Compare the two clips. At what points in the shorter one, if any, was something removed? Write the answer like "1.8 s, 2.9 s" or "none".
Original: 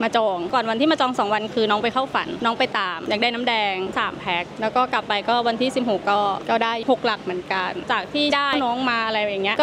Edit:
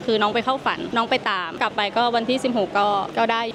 1.6 s

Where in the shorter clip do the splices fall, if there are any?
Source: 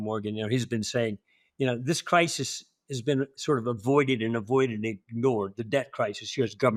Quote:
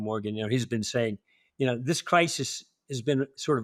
none

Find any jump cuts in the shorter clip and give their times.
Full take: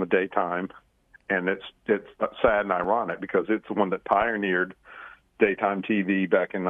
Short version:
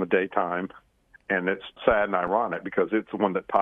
1.8 s

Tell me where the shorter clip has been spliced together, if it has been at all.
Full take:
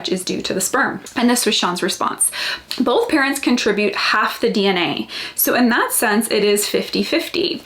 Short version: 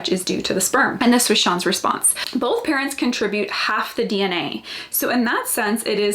0.9 s, 2.1 s

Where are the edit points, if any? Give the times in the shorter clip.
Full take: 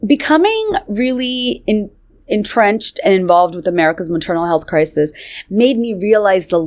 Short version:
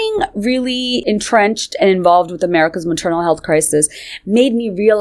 1.0 s

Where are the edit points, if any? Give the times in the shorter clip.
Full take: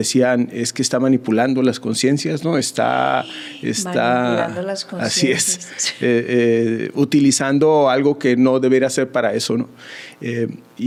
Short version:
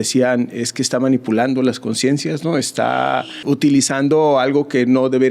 3.4 s

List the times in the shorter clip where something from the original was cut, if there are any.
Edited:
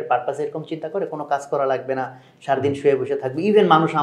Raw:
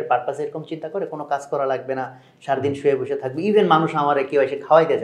none

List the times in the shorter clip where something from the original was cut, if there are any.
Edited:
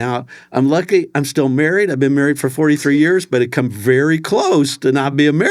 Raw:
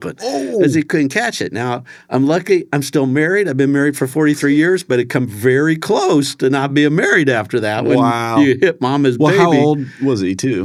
none

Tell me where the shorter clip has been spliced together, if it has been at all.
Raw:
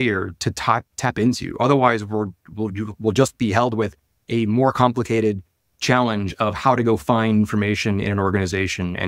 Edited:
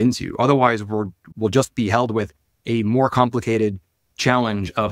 1.2 s

